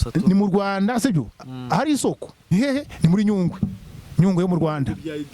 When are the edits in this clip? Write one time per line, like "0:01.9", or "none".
0:02.5